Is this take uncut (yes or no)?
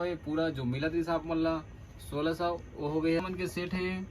no